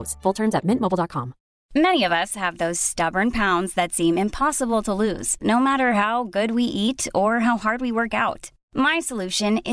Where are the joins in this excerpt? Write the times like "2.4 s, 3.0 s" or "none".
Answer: 1.6 s

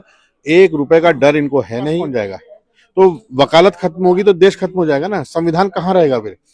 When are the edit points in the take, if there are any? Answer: 2.0 s

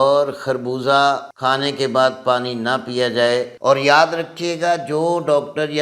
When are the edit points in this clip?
1.3 s, 3.5 s

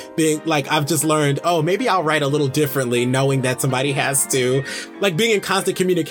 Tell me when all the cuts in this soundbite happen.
none

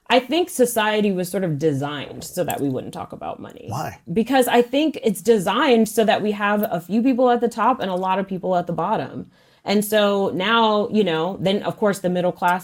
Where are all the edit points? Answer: none

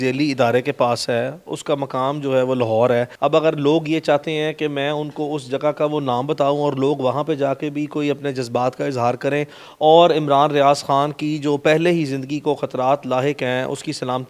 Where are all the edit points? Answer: none

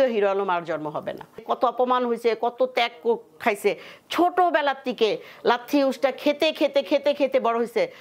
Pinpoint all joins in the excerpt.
1.5 s

